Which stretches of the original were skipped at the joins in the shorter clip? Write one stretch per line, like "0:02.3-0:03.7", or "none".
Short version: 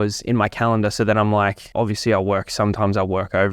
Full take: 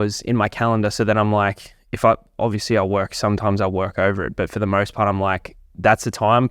0:01.6-0:02.3

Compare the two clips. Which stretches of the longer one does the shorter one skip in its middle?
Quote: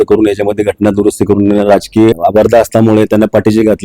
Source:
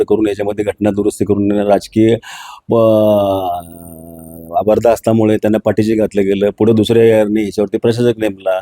0:02.1-0:04.5

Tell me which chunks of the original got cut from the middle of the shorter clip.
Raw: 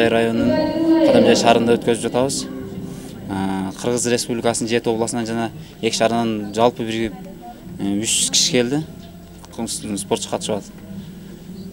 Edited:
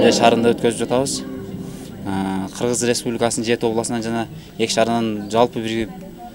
none

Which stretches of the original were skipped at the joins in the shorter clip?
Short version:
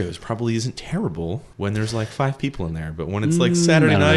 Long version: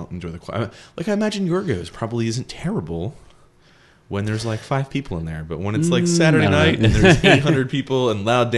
0:03.2-0:04.0

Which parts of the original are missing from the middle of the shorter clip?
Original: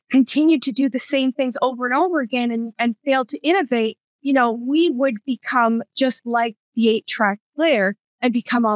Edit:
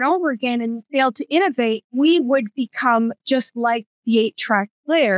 0:02.7-0:03.0
0:04.0-0:04.6

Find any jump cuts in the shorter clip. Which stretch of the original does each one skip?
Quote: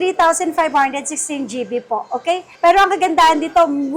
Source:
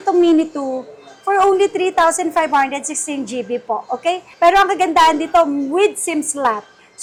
none

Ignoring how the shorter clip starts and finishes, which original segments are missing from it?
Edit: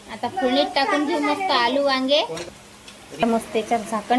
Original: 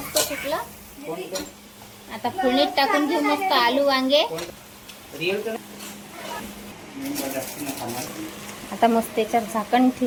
0:05.2-0:08.8

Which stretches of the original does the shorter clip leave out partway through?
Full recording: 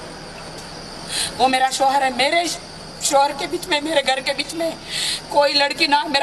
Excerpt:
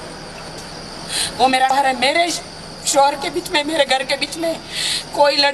0:01.7-0:01.9

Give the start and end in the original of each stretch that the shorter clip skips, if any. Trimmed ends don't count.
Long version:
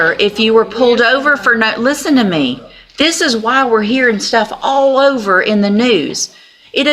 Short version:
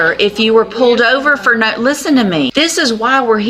0:02.5-0:02.9

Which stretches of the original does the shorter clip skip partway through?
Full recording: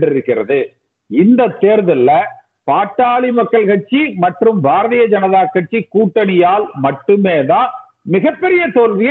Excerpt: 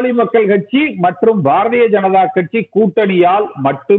none

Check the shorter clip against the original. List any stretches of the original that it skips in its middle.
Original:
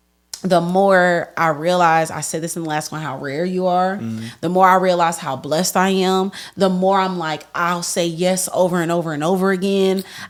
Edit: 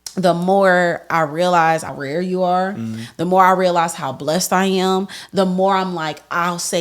0:02.2-0:03.2

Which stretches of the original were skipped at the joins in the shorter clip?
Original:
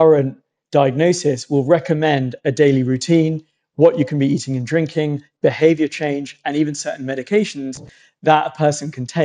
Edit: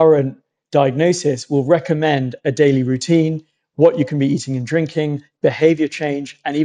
none

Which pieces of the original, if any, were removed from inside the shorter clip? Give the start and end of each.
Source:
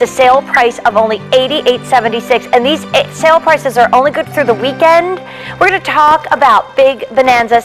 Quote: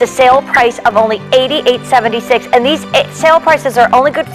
none

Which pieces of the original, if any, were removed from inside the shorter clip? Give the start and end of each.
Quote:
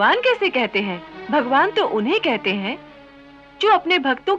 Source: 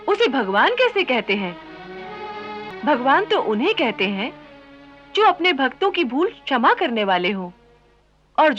0:01.6-0:02.6

